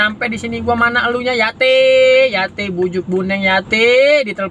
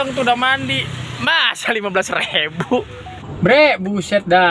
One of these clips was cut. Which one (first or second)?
second